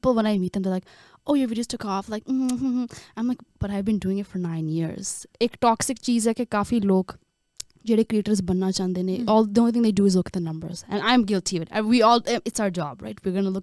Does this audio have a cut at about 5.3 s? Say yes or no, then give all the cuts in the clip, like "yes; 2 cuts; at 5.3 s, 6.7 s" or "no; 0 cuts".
yes; 1 cut; at 5.3 s